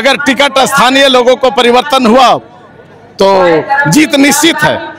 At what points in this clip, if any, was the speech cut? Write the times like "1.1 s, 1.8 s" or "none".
none